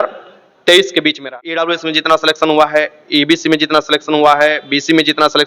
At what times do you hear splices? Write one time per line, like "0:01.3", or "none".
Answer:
0:01.2

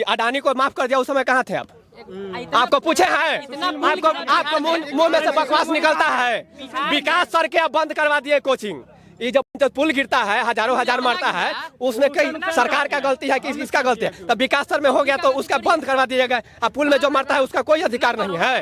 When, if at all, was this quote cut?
none

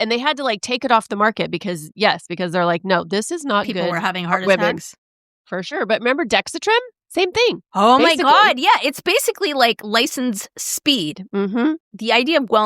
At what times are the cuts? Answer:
0:11.6

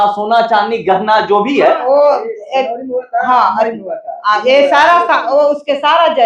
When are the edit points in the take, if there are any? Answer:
0:01.8

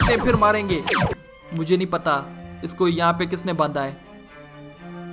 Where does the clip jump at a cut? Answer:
0:01.3

